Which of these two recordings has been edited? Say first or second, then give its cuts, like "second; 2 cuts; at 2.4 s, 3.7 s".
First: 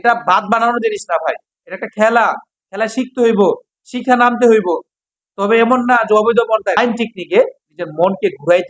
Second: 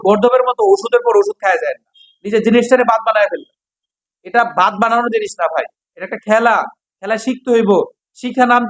first; 1 cut; at 6.8 s